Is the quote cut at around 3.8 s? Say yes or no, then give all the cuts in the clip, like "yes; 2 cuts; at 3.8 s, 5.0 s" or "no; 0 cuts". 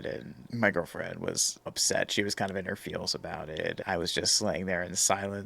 yes; 2 cuts; at 1.7 s, 3.8 s